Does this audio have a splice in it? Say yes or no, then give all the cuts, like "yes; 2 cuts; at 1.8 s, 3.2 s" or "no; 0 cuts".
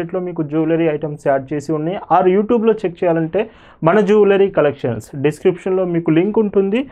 no; 0 cuts